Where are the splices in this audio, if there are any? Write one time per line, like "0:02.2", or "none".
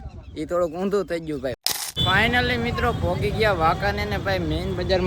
0:01.6